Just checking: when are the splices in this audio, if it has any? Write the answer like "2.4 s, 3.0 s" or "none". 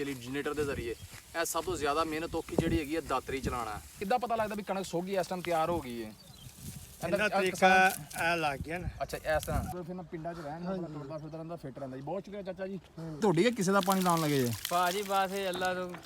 3.9 s, 9.7 s, 13.2 s